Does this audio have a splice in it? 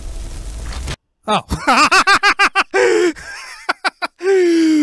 yes; 1 cut; at 1.1 s

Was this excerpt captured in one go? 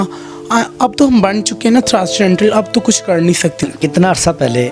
no; 1 cut; at 3.6 s

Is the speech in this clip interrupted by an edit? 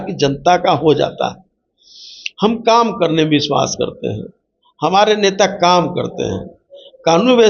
no; 0 cuts

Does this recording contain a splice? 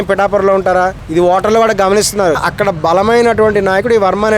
yes; 2 cuts; at 1.0 s, 2.4 s

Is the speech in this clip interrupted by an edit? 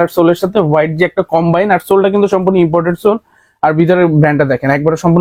no; 0 cuts

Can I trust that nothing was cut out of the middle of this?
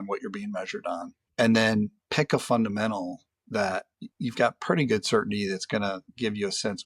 no; 3 cuts; at 1.2 s, 2.0 s, 4.0 s

